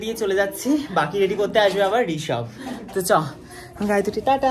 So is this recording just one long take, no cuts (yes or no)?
yes